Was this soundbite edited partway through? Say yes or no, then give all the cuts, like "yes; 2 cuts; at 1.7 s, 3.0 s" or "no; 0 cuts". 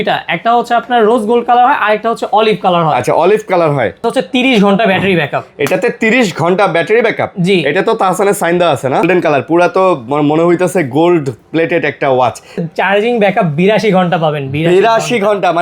yes; 3 cuts; at 4.0 s, 9.1 s, 12.6 s